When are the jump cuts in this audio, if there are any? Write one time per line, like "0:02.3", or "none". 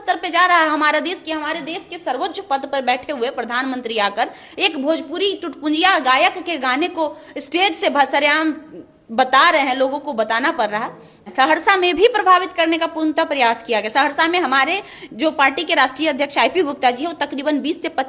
0:11.2